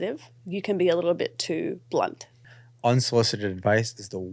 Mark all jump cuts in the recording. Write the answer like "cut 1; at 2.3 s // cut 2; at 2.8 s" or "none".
cut 1; at 2.5 s